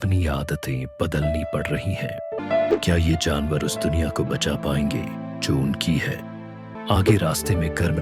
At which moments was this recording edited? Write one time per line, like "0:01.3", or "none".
0:02.4
0:06.7